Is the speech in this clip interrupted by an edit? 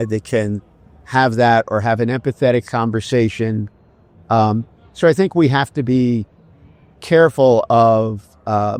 no; 0 cuts

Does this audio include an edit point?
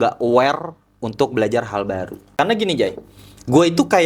yes; 1 cut; at 2.2 s

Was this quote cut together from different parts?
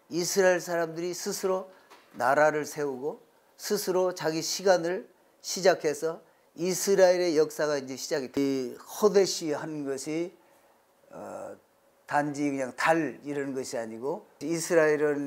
yes; 2 cuts; at 8.4 s, 14.3 s

